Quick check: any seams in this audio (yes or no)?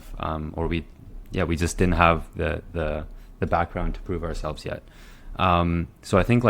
no